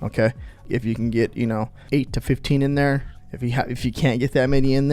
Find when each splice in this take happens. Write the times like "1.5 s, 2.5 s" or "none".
1.7 s